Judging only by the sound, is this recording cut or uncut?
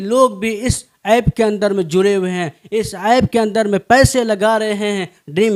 uncut